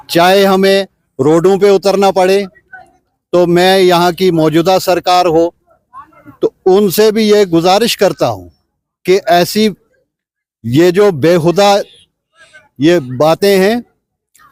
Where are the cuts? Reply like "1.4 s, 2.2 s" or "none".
none